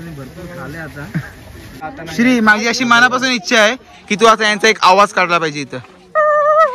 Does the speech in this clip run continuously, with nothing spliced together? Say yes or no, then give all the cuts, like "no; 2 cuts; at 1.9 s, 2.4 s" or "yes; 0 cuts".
no; 1 cut; at 1.8 s